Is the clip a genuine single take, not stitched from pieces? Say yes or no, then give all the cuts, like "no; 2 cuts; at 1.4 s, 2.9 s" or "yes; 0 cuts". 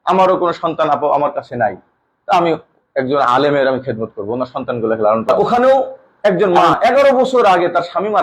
no; 1 cut; at 5.3 s